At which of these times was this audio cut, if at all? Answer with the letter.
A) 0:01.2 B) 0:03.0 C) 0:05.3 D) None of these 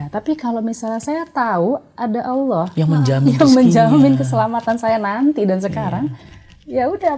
D